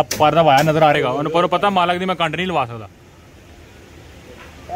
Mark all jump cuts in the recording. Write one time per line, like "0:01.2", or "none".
0:00.9